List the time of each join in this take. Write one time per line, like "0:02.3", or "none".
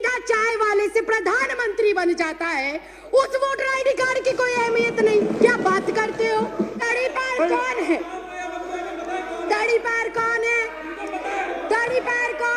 0:06.9